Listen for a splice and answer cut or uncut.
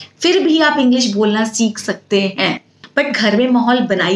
cut